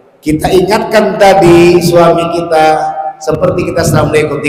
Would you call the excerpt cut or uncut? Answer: uncut